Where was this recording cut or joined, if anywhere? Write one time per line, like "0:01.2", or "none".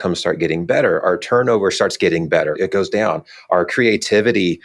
0:01.0
0:02.6